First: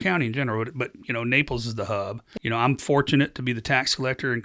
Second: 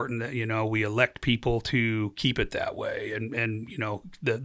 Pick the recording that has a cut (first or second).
first